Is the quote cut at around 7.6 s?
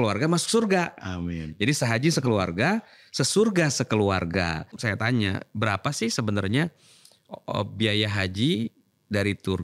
no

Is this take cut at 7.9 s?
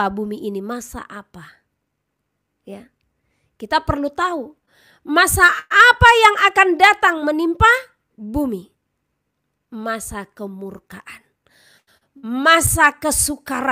no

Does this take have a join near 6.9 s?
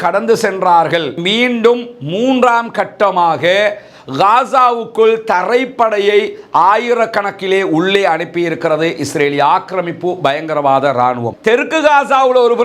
no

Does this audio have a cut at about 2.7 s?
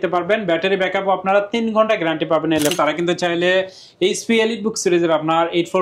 yes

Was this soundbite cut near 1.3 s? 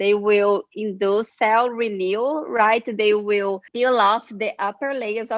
yes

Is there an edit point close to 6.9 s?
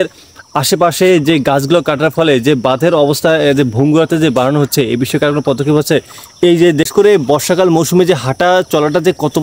yes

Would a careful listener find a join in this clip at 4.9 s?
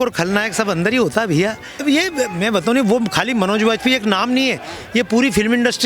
no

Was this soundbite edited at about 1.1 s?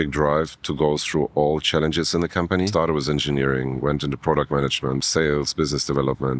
no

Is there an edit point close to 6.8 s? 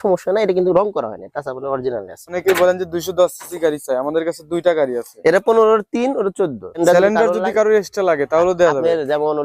yes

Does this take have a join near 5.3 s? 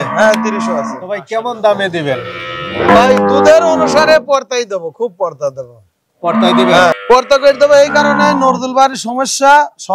no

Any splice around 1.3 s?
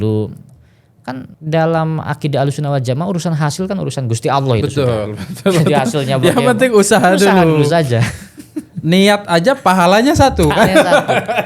yes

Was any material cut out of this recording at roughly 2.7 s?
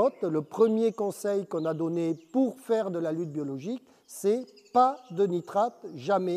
no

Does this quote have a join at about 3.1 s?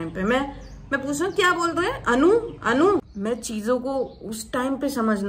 yes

